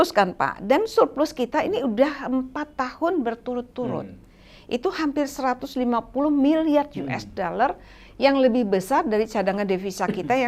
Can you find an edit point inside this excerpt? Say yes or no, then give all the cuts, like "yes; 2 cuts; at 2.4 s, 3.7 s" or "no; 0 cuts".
no; 0 cuts